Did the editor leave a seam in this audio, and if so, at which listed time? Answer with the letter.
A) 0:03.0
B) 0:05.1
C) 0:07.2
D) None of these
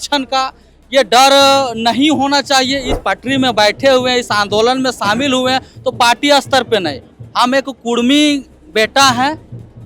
A